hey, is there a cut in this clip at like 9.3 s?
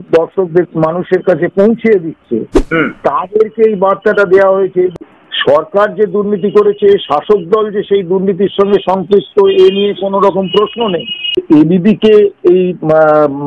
no; 2 cuts; at 4.9 s, 11.4 s

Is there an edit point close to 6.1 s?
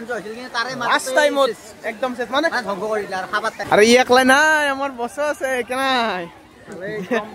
no; 1 cut; at 3.6 s

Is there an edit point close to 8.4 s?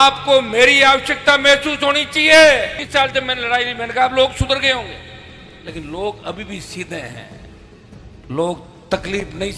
no; 1 cut; at 2.8 s

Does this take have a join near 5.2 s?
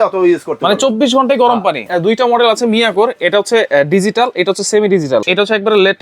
yes; 2 cuts; at 1.9 s, 5.2 s

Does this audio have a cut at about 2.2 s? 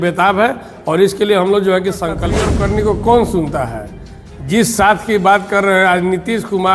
yes; 1 cut; at 2.2 s

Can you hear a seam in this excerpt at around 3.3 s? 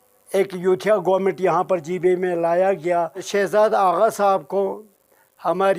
yes; 1 cut; at 3.3 s

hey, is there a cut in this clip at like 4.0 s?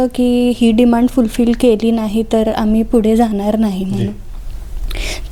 no; 0 cuts

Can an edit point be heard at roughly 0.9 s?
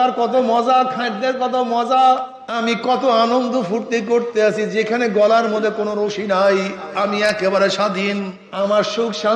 no; 2 cuts; at 2.4 s, 8.4 s

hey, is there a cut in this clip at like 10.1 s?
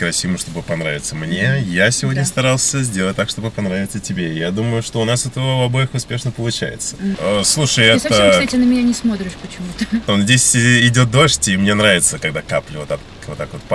yes; 2 cuts; at 7.2 s, 10.1 s

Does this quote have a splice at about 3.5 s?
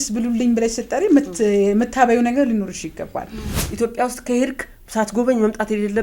yes; 1 cut; at 3.5 s

